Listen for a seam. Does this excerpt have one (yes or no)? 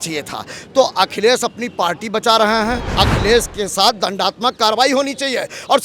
yes